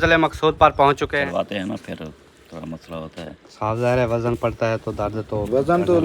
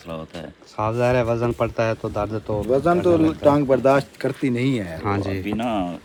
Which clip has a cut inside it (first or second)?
first